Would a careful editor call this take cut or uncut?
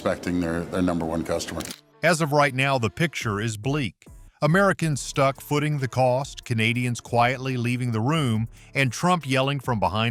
uncut